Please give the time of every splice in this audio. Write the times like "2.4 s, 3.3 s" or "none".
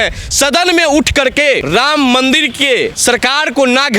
1.6 s, 3.0 s